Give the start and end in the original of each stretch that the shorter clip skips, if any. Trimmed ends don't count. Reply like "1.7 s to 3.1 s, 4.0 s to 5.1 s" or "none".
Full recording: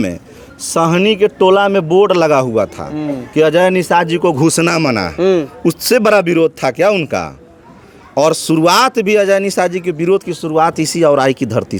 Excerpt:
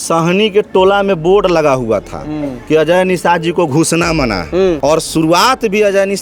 5.4 s to 8.1 s